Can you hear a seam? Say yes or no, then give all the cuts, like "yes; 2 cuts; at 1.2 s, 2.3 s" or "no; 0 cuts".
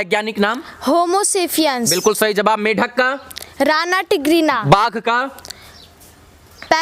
no; 0 cuts